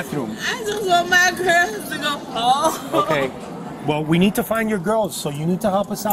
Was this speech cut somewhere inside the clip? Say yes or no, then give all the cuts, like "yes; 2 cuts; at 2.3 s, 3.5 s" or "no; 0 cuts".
yes; 1 cut; at 5.1 s